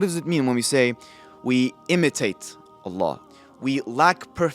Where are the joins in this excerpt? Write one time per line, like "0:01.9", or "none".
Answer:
0:03.2

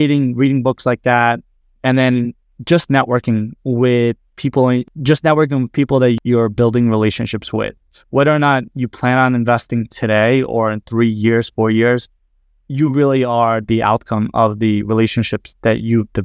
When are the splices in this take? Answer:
0:04.9
0:06.2

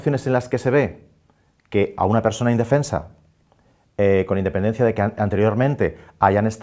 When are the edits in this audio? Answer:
0:01.3

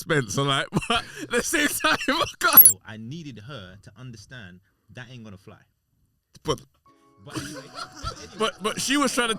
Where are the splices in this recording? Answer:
0:02.8

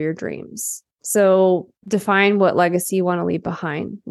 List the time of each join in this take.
0:01.7

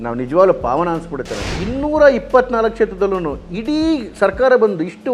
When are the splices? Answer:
0:01.6

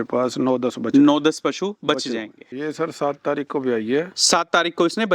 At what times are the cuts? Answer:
0:02.4

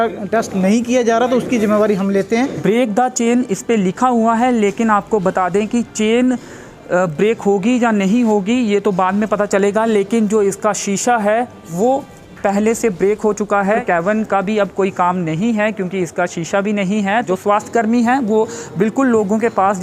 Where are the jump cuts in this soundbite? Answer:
0:02.6
0:13.8
0:17.3

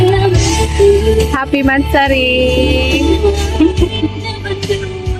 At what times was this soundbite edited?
none

